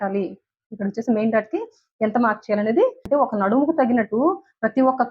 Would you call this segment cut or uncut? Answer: cut